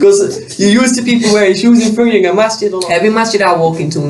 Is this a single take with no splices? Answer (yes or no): no